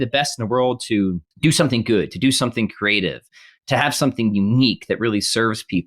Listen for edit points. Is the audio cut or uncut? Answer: cut